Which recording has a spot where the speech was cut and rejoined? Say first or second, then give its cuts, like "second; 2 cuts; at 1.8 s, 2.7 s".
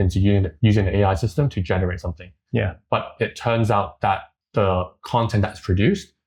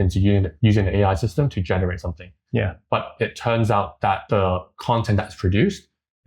second; 1 cut; at 4.2 s